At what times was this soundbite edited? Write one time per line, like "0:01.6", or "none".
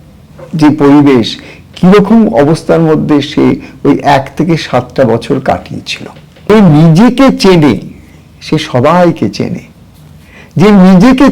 0:06.5